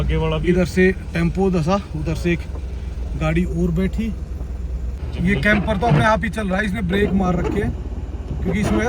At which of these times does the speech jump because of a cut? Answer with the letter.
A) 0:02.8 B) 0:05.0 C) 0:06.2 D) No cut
B